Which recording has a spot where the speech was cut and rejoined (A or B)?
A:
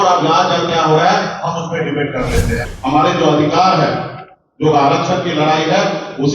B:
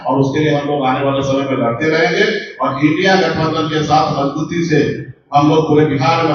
A